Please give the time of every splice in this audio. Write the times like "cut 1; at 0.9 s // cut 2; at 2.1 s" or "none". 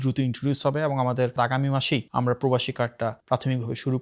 cut 1; at 1.3 s